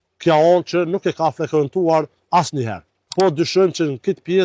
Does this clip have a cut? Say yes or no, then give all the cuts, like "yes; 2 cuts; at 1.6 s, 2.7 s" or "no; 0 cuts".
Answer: yes; 1 cut; at 3.0 s